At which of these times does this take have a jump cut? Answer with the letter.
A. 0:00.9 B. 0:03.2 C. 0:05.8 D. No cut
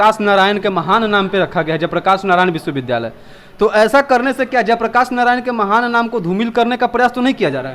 D